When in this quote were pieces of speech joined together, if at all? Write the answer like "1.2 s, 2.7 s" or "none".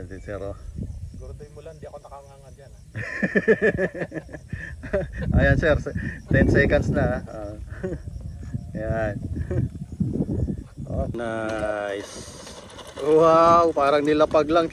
11.1 s

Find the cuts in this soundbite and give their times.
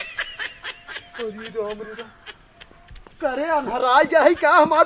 0.9 s

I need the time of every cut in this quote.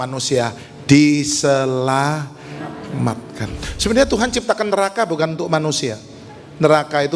3.5 s

